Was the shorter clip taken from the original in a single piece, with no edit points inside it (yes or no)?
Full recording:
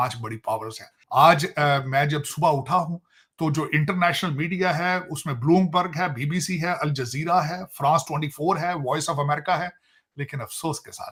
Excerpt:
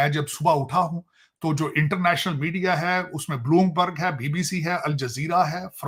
yes